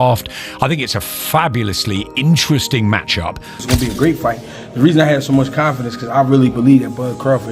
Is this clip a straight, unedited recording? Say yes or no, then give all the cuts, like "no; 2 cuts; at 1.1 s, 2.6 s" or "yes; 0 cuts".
no; 1 cut; at 3.6 s